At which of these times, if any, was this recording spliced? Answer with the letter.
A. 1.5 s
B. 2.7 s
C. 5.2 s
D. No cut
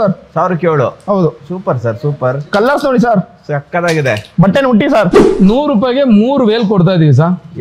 C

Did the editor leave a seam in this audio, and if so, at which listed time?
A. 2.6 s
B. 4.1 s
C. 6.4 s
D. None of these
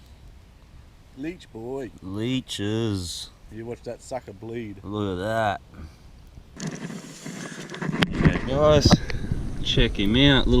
C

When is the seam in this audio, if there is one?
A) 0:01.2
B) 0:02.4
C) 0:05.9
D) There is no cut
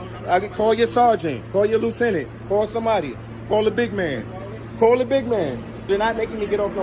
C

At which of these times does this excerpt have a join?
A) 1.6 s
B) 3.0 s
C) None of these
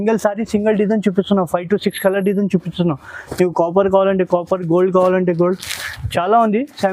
C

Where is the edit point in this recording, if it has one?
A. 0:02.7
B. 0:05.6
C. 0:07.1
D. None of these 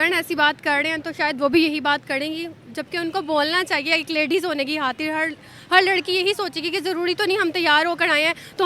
D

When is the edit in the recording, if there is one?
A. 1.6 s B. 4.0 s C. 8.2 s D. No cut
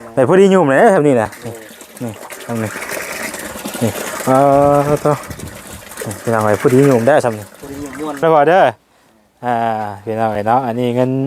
C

